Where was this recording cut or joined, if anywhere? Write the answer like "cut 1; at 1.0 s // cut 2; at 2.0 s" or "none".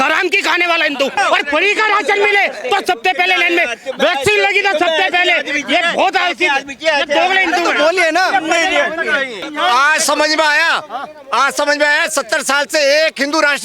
cut 1; at 1.2 s // cut 2; at 9.4 s